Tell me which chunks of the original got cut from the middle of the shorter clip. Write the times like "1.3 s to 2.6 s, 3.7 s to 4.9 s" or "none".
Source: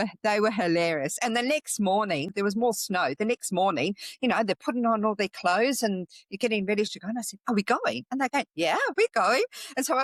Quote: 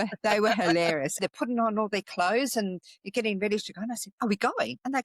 1.2 s to 4.5 s